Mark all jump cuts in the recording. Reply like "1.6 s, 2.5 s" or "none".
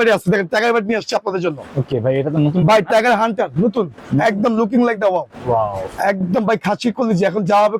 none